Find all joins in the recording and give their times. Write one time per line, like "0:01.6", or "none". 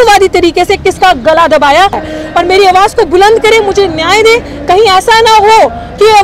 0:02.1